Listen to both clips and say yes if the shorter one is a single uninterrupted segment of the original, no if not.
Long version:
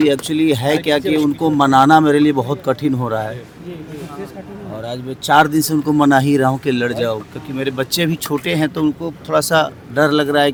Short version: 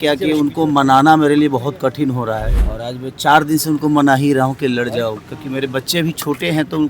no